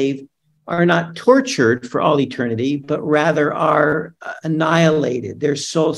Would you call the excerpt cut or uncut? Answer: uncut